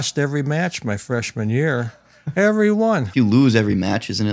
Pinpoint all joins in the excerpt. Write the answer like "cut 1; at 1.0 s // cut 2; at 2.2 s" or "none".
cut 1; at 3.1 s